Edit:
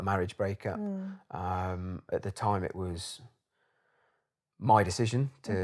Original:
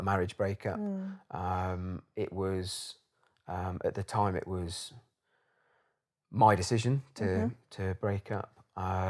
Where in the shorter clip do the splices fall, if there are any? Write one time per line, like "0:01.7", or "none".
0:02.0